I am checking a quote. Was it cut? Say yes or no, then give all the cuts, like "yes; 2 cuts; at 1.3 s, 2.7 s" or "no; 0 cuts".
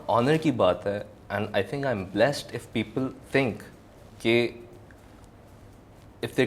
no; 0 cuts